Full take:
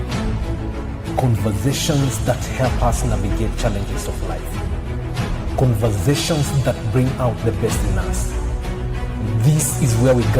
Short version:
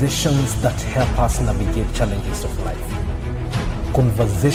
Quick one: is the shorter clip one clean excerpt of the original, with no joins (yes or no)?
yes